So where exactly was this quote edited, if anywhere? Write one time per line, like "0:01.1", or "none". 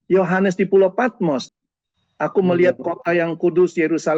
0:01.4